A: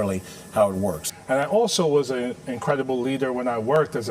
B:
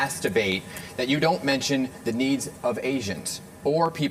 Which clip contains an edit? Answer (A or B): A